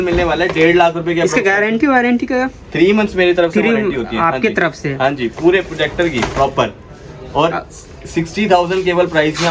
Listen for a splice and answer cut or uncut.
uncut